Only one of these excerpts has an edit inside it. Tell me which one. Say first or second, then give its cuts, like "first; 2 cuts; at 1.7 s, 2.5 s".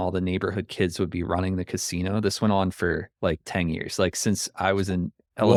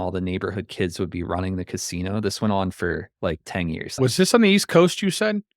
second; 1 cut; at 3.9 s